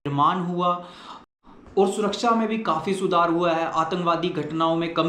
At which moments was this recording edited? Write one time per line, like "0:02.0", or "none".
0:01.6